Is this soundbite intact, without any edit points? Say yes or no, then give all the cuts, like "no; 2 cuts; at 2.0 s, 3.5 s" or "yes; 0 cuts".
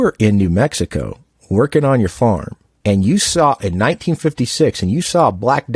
yes; 0 cuts